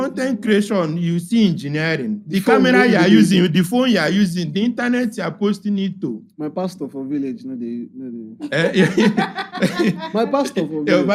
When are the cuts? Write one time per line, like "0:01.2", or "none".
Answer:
none